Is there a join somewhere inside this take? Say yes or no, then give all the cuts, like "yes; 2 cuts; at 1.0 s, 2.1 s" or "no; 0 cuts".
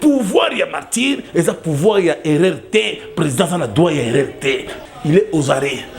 yes; 1 cut; at 4.7 s